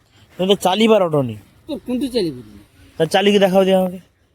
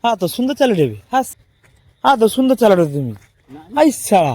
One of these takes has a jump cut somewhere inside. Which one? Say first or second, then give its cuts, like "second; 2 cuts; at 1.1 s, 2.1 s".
second; 1 cut; at 1.3 s